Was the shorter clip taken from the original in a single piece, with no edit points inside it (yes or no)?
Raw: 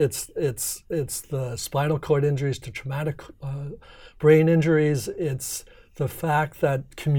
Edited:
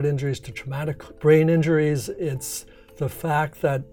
no